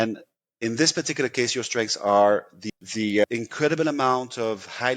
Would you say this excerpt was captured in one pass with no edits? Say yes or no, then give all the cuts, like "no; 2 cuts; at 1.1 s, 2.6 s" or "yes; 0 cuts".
no; 1 cut; at 2.5 s